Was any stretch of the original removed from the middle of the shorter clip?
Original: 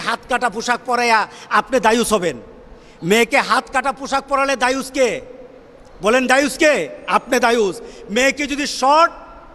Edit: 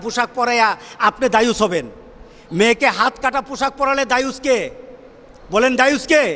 no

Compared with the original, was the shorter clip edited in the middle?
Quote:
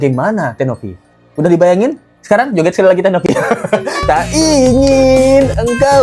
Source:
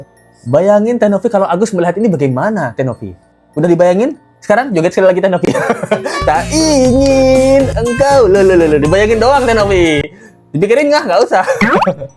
no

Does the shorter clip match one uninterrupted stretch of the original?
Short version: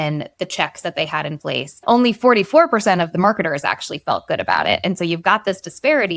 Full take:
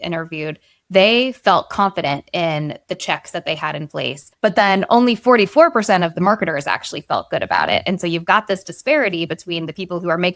no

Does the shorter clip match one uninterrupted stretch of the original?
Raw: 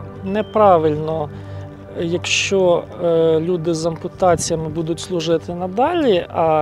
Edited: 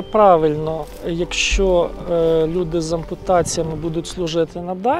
no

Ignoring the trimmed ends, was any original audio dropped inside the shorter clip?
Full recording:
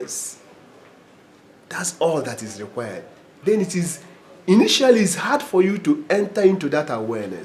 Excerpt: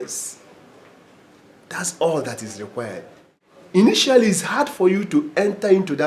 yes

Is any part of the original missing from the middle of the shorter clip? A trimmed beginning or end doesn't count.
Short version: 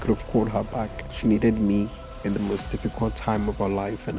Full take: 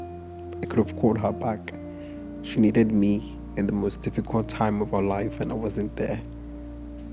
yes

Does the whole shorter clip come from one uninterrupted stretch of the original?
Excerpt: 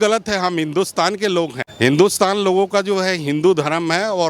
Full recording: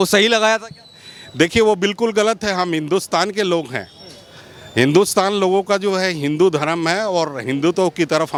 no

